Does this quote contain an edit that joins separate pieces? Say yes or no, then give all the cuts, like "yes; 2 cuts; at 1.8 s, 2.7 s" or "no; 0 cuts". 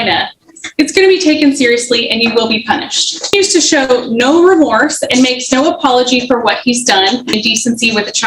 yes; 2 cuts; at 3.3 s, 7.4 s